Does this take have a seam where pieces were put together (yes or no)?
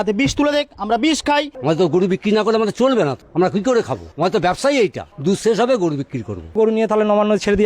yes